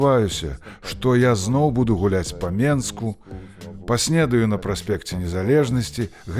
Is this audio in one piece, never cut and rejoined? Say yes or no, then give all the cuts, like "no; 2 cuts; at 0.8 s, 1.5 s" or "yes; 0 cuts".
yes; 0 cuts